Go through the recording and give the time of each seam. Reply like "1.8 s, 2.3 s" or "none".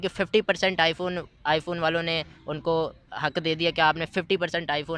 none